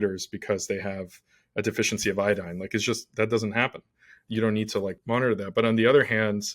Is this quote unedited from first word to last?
no; 2 cuts; at 4.1 s, 5.0 s

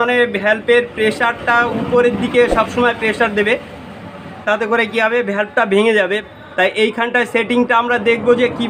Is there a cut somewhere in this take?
yes; 1 cut; at 6.2 s

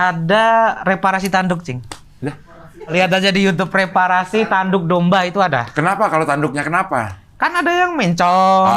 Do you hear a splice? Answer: yes; 1 cut; at 2.9 s

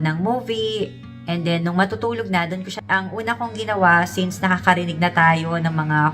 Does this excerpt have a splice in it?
yes; 1 cut; at 2.8 s

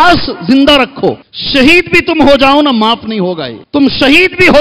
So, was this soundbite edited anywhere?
yes; 2 cuts; at 1.3 s, 3.5 s

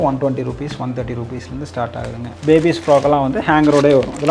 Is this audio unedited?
yes; 0 cuts

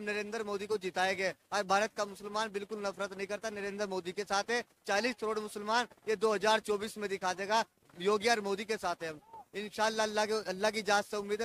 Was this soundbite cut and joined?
no; 0 cuts

